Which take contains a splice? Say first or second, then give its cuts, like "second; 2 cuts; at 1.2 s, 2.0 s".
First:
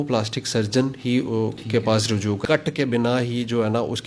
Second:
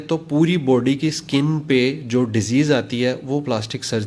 first; 1 cut; at 2.4 s